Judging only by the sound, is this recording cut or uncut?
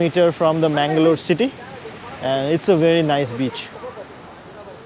uncut